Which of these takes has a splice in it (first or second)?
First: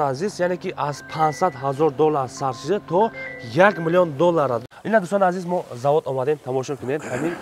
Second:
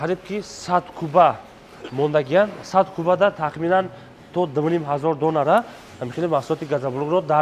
first